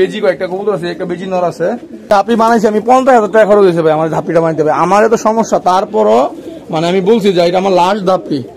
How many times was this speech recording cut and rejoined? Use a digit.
1